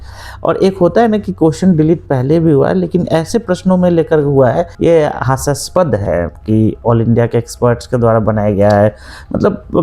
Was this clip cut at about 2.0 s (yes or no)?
no